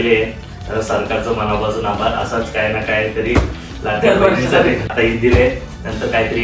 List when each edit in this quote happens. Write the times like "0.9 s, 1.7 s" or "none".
4.9 s